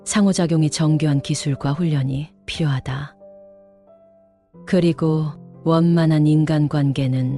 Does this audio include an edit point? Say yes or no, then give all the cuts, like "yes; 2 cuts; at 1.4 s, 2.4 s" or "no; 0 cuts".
no; 0 cuts